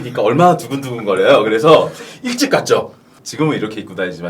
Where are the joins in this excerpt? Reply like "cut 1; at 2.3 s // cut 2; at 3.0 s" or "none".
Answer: cut 1; at 3.2 s